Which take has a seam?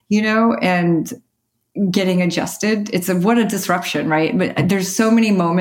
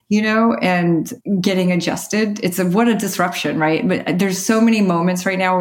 second; 1 cut; at 1.2 s

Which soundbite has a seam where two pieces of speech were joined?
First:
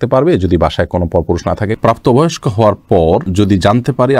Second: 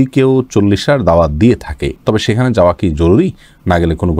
first; 1 cut; at 1.7 s

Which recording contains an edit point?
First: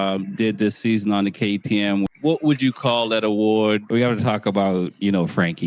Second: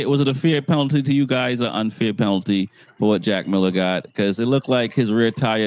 first; 2 cuts; at 2.1 s, 3.8 s

